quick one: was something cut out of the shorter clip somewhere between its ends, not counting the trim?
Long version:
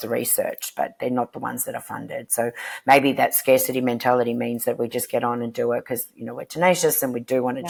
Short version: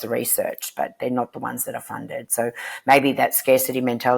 no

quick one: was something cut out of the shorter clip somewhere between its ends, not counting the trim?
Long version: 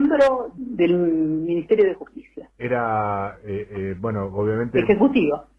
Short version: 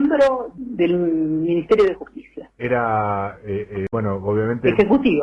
yes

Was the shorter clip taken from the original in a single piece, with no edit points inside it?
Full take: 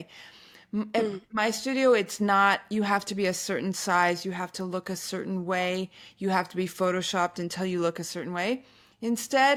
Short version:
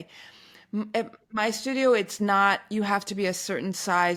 yes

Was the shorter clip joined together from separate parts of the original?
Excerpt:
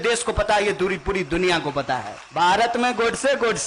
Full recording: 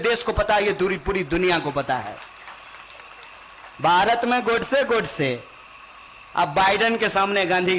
yes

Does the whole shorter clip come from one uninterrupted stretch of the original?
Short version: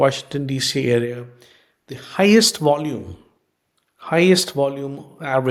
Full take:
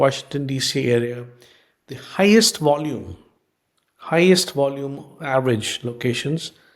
yes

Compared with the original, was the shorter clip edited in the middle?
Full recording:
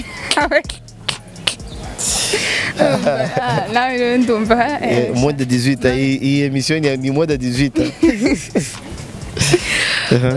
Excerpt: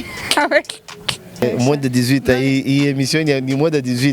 yes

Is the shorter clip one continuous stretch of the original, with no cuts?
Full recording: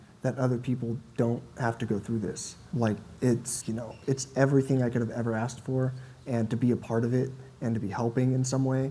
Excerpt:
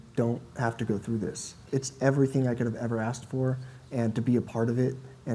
no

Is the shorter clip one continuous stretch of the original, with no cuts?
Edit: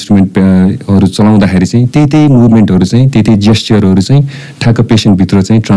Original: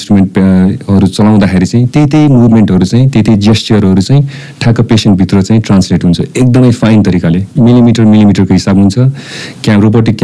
yes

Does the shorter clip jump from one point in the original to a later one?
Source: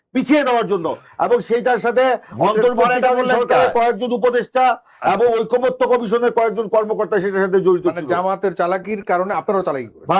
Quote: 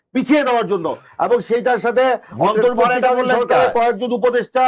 no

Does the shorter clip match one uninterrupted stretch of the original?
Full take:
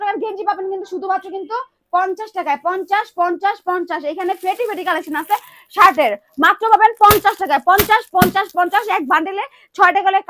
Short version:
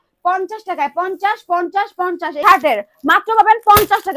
no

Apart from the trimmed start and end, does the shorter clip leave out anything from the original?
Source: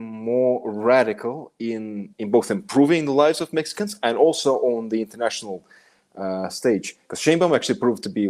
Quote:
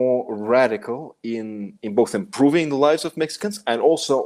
no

